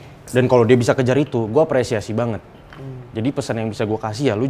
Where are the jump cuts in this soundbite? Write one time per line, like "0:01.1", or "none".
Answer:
none